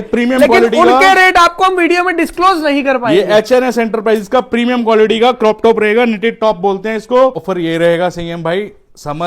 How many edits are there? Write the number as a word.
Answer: one